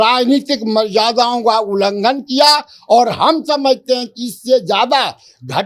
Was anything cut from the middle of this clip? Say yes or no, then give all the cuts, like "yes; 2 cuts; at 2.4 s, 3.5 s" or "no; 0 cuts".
no; 0 cuts